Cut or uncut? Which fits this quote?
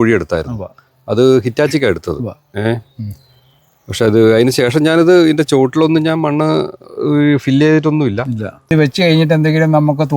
cut